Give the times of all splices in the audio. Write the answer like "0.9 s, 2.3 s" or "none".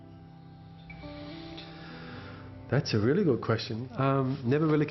1.2 s